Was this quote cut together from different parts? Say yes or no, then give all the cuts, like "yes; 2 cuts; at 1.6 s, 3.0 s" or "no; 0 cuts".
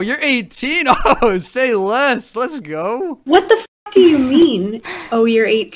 no; 0 cuts